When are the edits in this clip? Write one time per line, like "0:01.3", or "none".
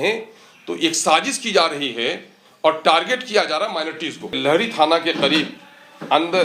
0:04.4